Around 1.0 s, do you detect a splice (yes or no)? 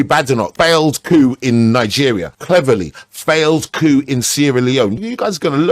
no